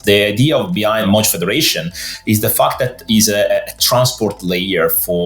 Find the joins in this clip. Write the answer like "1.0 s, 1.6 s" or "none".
1.1 s